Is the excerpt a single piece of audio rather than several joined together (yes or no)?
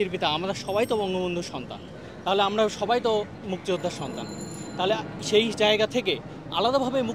yes